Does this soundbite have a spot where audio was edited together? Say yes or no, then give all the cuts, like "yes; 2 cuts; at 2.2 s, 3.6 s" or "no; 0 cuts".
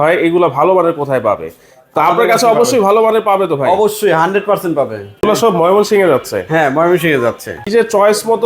yes; 2 cuts; at 5.2 s, 7.7 s